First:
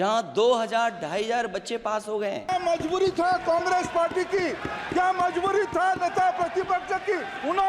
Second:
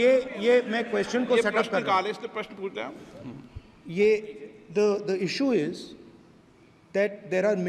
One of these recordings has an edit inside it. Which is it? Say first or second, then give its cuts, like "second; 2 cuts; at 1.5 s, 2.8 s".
first; 1 cut; at 2.5 s